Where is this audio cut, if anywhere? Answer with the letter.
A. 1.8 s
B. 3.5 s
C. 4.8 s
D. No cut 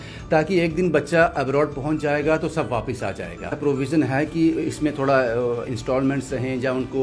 B